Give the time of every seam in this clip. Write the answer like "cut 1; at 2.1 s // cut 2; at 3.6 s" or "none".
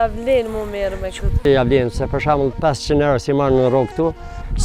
cut 1; at 1.4 s